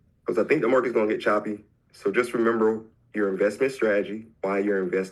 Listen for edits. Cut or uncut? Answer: uncut